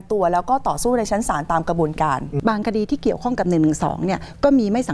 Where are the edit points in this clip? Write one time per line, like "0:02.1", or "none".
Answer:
0:02.3